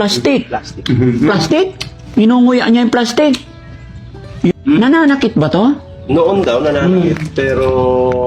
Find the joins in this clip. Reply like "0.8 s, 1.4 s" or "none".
4.5 s